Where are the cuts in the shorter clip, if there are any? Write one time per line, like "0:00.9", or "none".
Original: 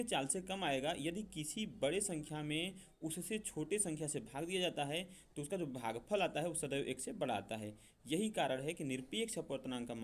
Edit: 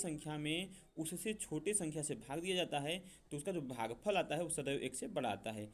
none